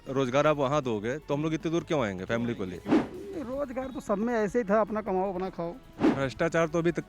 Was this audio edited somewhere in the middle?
yes; 2 cuts; at 3.0 s, 6.0 s

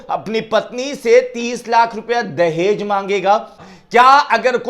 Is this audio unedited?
no; 1 cut; at 3.7 s

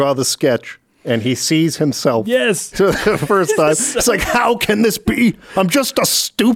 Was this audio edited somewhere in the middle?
no; 0 cuts

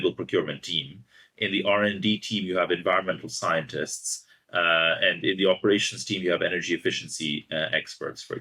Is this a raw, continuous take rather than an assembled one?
yes; 0 cuts

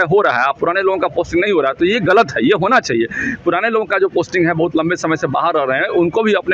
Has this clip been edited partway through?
no; 0 cuts

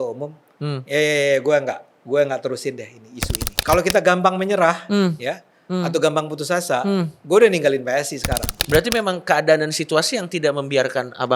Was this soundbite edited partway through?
yes; 2 cuts; at 3.5 s, 8.5 s

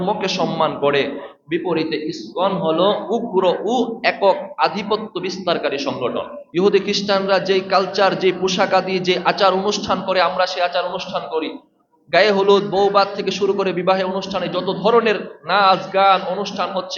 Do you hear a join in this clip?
yes; 1 cut; at 6.4 s

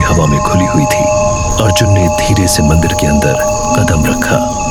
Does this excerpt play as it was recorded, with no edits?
yes; 0 cuts

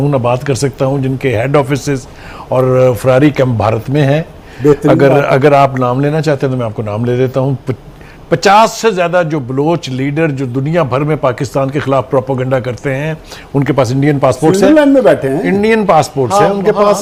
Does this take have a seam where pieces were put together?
no; 0 cuts

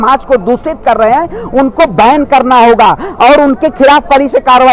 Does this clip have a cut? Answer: no; 0 cuts

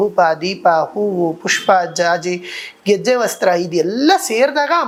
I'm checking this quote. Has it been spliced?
no; 0 cuts

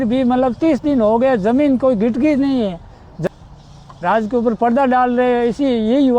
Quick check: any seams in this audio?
yes; 1 cut; at 3.2 s

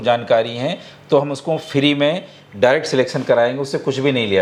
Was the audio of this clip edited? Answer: no; 0 cuts

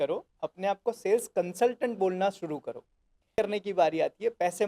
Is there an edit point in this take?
yes; 1 cut; at 3.4 s

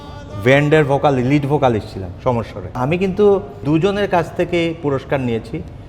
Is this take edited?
yes; 2 cuts; at 2.7 s, 3.6 s

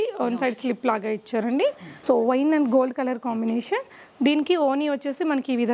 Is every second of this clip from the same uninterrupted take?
no; 1 cut; at 1.9 s

